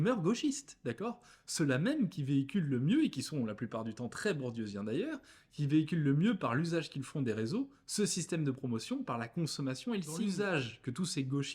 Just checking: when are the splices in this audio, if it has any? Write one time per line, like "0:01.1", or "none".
0:10.3